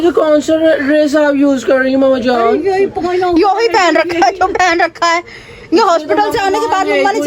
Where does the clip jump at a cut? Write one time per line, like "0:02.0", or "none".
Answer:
0:02.9